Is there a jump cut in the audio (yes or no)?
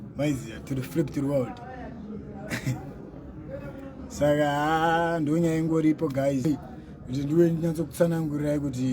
yes